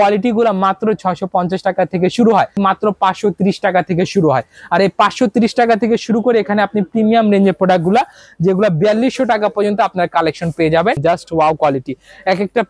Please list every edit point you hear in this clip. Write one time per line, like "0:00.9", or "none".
0:02.6
0:11.0